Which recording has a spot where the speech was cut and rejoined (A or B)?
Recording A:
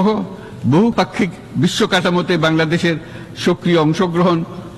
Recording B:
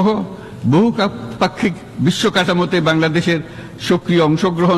A